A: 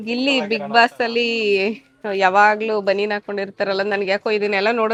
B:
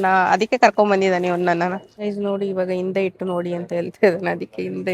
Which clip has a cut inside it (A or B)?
B